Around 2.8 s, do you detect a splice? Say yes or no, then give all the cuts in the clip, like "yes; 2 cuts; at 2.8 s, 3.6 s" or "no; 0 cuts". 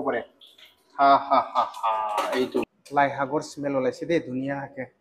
yes; 1 cut; at 2.8 s